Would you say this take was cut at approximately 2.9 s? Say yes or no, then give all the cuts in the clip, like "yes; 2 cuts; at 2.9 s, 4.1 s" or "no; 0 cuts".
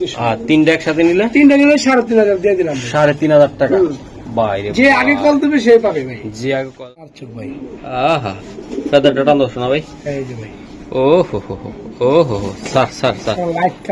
no; 1 cut; at 7.2 s